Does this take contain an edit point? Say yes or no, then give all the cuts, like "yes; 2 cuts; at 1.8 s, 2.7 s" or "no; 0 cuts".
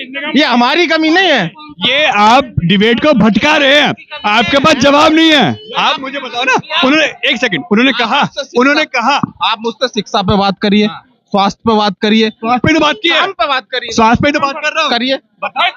no; 0 cuts